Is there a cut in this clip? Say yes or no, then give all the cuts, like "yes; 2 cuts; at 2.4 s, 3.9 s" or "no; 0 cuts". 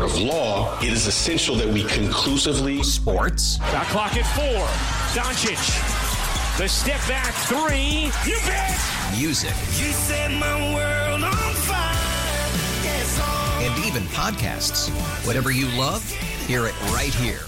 no; 0 cuts